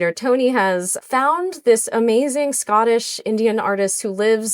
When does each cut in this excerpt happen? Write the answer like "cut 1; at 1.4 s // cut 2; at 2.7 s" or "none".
cut 1; at 0.9 s